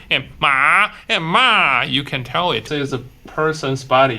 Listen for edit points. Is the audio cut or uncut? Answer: cut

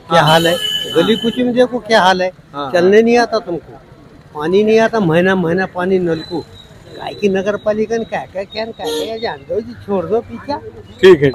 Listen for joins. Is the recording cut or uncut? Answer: uncut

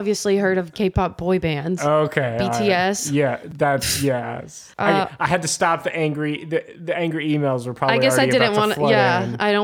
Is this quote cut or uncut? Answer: uncut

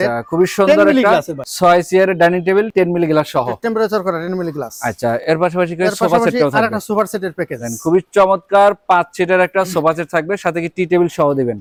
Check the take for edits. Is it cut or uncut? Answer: uncut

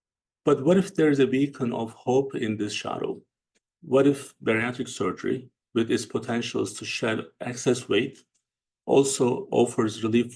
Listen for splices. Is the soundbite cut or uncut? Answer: uncut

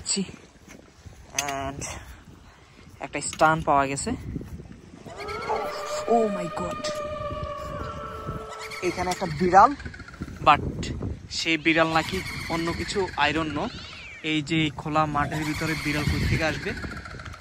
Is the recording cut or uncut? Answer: uncut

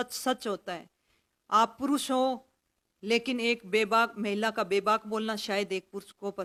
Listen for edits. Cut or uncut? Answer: uncut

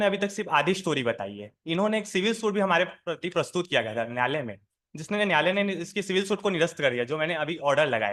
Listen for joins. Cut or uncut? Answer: uncut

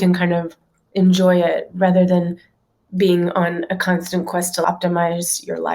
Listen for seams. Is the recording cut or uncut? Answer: cut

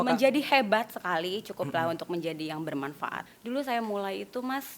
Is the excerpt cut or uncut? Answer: cut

